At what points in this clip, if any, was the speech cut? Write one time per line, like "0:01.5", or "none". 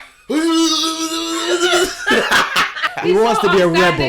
0:02.8